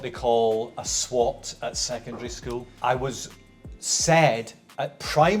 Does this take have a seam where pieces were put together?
yes; 1 cut; at 2.7 s

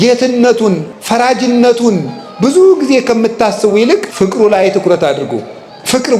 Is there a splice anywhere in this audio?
yes; 2 cuts; at 0.9 s, 4.1 s

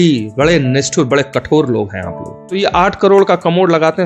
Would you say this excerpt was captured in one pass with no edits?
no; 1 cut; at 2.5 s

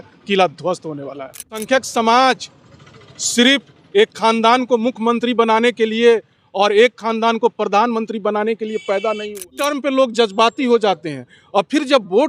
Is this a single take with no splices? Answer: no; 2 cuts; at 1.6 s, 9.6 s

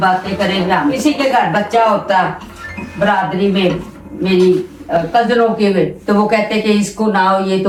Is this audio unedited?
yes; 0 cuts

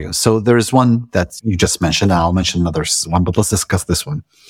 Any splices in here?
yes; 1 cut; at 1.4 s

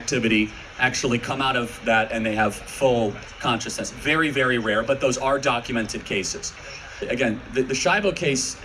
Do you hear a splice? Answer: yes; 1 cut; at 7.0 s

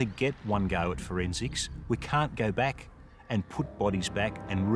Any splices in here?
no; 0 cuts

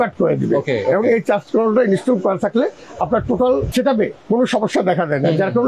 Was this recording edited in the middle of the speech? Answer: no; 0 cuts

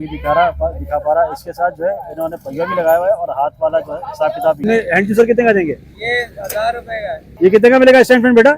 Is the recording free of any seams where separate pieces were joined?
no; 2 cuts; at 4.6 s, 7.3 s

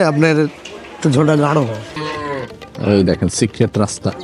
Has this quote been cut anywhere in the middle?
yes; 1 cut; at 2.0 s

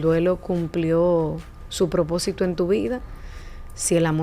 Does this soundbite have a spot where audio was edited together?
no; 0 cuts

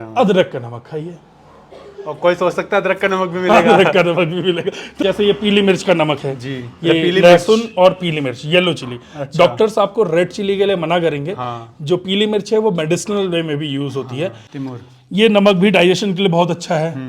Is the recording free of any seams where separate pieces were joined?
no; 2 cuts; at 5.0 s, 14.5 s

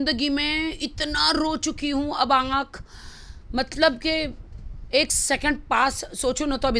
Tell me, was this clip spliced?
no; 0 cuts

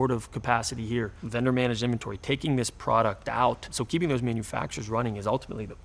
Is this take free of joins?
no; 2 cuts; at 1.2 s, 3.8 s

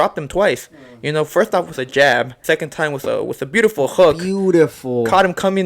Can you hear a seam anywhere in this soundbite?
yes; 1 cut; at 2.3 s

